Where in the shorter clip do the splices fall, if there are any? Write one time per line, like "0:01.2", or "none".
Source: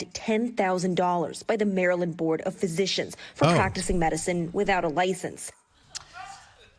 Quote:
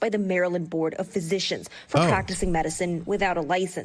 none